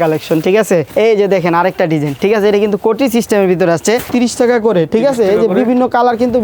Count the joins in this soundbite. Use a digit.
3